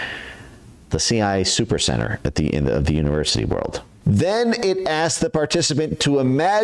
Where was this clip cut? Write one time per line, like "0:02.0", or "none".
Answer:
0:03.9